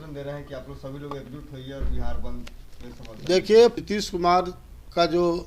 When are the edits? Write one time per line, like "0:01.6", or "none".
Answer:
0:03.8